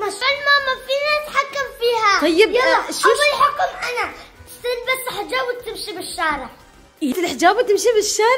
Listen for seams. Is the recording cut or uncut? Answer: uncut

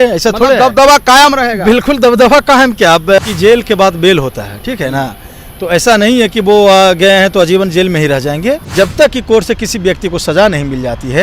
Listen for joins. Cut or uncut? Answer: cut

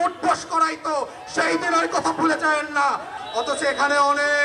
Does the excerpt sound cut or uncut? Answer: cut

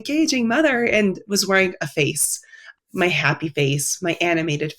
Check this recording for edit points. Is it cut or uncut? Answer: cut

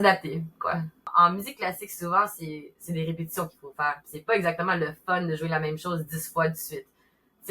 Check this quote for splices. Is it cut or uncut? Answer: cut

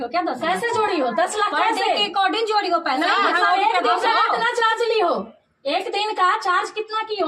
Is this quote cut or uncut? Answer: uncut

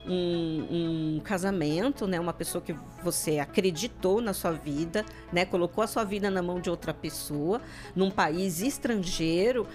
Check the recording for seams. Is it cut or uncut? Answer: uncut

